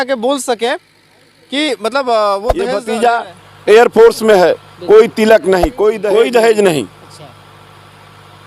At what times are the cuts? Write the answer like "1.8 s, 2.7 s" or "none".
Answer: 2.8 s, 6.0 s